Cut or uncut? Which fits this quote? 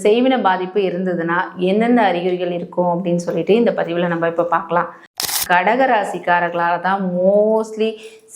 cut